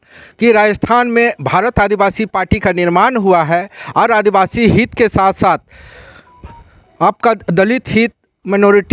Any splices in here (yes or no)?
no